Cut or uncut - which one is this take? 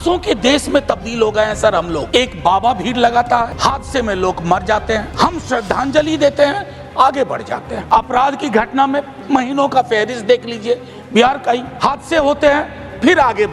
cut